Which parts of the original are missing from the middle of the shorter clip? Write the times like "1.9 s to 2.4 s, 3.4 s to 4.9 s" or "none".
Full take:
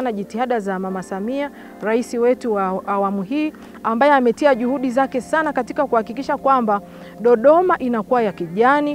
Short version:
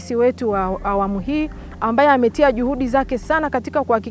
none